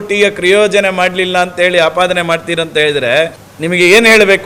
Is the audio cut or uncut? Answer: cut